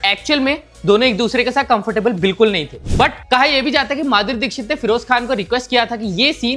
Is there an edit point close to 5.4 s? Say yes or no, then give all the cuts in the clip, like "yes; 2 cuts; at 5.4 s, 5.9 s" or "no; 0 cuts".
no; 1 cut; at 2.8 s